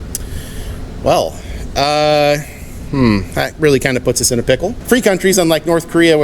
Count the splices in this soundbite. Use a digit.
1